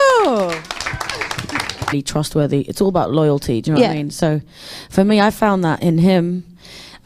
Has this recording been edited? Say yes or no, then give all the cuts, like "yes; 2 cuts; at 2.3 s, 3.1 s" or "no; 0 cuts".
no; 0 cuts